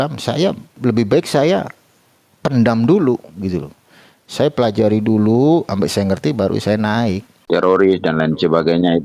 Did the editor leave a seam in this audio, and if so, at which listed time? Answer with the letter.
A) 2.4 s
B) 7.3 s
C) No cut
B